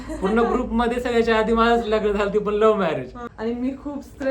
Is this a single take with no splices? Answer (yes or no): no